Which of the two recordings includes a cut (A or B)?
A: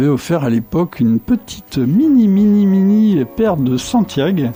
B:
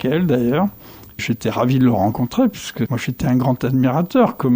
B